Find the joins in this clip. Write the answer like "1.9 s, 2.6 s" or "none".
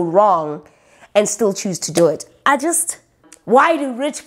3.3 s

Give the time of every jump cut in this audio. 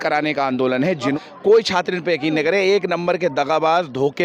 1.1 s

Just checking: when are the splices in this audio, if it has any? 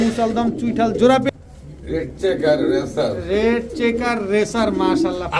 1.3 s

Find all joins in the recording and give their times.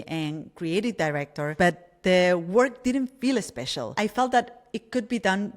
1.5 s

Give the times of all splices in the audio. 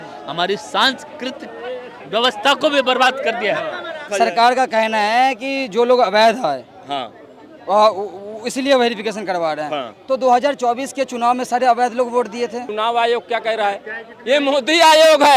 4.1 s, 12.7 s

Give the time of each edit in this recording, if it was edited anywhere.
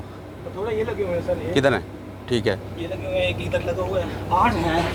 none

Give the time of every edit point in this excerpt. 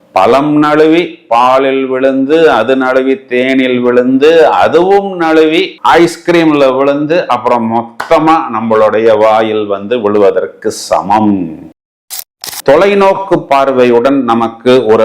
12.0 s

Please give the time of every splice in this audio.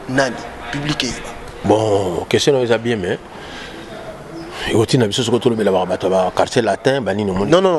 1.5 s

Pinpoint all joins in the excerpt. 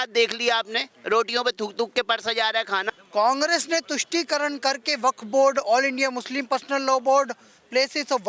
3.0 s

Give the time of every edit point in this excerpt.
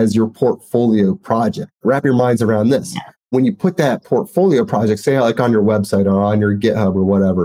1.8 s

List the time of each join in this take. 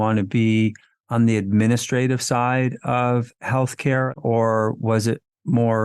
4.1 s

